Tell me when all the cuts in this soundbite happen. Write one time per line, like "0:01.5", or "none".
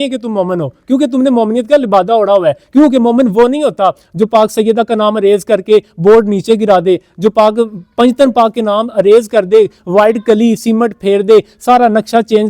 none